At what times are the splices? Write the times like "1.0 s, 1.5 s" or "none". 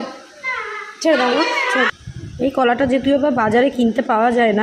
2.0 s